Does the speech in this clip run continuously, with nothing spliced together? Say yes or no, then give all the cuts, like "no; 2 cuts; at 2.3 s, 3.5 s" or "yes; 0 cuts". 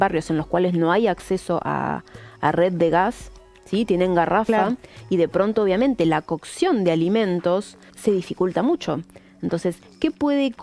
no; 1 cut; at 7.9 s